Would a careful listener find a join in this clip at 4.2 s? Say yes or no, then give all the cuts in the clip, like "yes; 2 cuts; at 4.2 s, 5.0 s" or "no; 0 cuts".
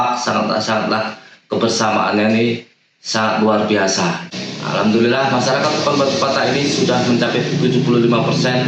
yes; 1 cut; at 4.2 s